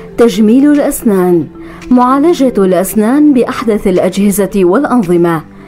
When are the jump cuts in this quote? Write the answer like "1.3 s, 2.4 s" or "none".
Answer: none